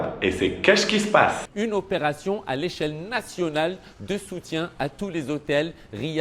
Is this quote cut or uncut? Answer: cut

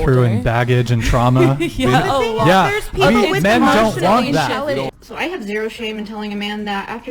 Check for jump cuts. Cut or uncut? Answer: cut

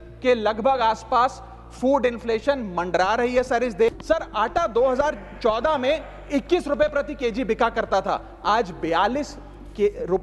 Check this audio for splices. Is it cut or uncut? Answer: cut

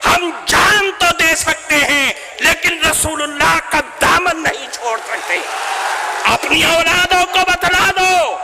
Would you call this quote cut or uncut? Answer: cut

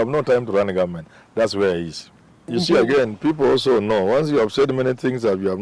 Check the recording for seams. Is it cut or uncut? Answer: cut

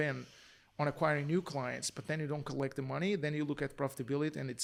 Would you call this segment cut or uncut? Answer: uncut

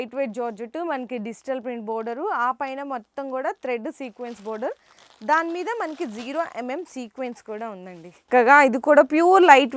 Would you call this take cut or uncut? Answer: cut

